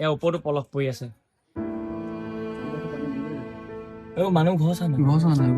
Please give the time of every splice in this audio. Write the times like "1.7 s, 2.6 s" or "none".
1.5 s